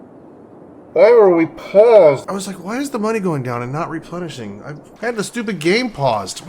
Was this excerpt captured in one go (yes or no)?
no